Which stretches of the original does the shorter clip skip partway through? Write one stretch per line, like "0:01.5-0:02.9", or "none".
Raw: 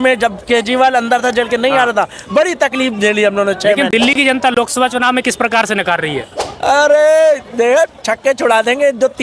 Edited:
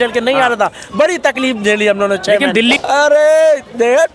0:04.1-0:06.6